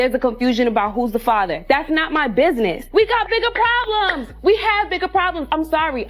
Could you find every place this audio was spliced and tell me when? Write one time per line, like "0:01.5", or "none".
0:02.8